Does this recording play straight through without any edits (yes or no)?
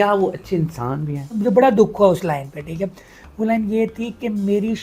no